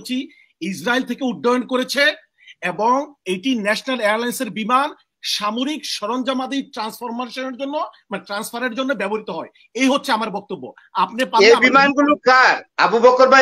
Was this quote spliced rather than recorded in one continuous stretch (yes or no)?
no